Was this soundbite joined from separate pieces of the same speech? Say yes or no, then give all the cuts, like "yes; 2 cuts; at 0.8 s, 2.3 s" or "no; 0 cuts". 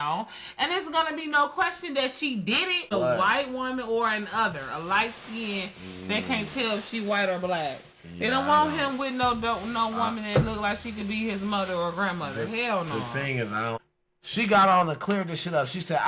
yes; 2 cuts; at 2.9 s, 13.9 s